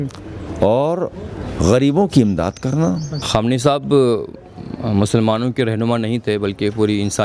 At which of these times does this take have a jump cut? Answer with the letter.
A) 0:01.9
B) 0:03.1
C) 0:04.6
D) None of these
B